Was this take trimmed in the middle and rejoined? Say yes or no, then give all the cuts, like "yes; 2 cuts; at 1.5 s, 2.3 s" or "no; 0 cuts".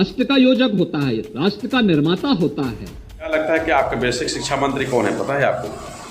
yes; 1 cut; at 3.3 s